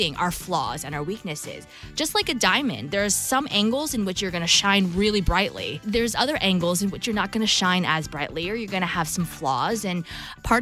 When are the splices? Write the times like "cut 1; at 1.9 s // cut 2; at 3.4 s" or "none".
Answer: cut 1; at 5.3 s